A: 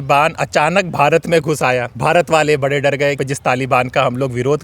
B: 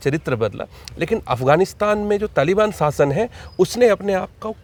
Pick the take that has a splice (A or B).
A